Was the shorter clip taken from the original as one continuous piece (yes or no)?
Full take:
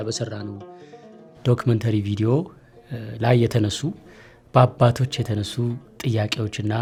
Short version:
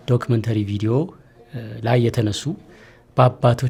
yes